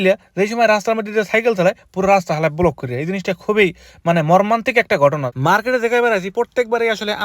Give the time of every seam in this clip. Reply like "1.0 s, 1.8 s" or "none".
5.3 s